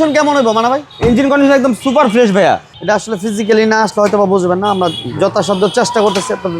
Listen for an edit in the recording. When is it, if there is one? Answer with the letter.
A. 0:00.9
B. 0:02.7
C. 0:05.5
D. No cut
B